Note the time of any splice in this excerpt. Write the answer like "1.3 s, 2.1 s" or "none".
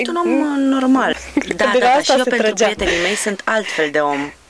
1.1 s